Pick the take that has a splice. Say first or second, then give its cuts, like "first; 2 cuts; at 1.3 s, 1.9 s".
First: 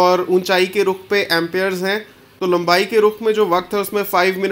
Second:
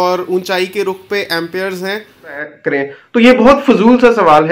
second; 1 cut; at 2.6 s